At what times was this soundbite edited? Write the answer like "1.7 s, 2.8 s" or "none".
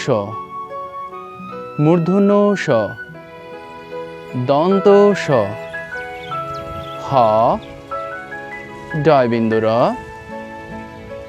5.5 s, 6.9 s